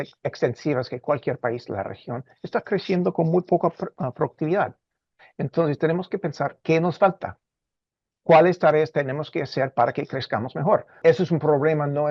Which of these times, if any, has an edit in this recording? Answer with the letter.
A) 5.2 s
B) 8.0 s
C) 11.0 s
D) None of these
C